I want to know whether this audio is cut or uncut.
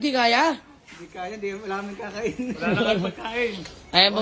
uncut